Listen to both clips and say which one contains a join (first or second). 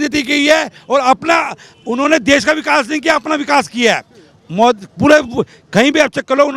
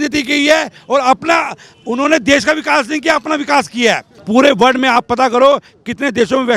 second